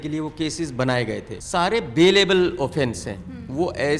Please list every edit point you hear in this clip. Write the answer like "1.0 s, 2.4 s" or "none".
1.3 s